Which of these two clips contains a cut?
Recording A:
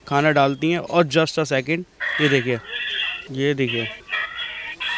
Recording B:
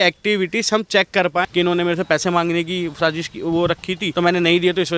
B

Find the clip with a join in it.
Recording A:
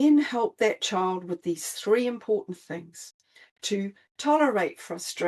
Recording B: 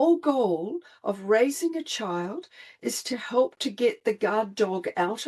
A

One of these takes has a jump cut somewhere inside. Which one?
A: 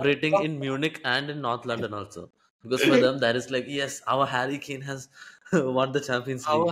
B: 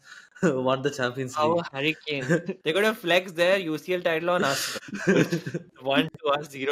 B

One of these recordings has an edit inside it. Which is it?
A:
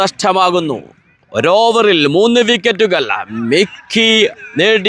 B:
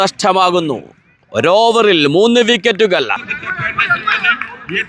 B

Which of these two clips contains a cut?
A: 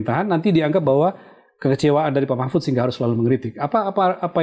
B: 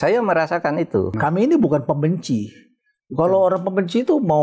B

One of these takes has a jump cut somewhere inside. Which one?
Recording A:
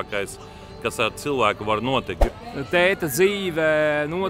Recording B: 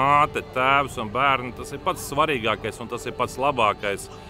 A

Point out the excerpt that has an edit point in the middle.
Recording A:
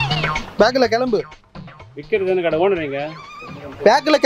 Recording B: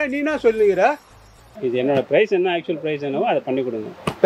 B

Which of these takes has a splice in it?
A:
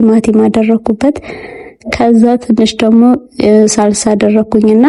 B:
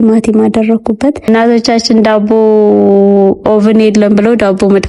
B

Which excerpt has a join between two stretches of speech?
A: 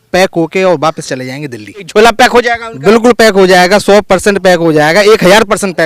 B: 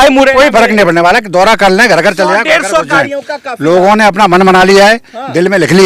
A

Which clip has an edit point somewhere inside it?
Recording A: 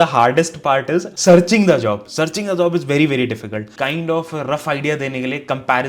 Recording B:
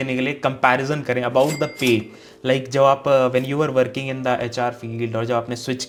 A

